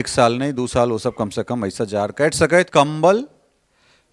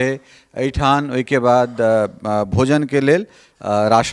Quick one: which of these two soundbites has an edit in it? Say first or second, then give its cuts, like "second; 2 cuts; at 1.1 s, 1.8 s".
first; 1 cut; at 2.7 s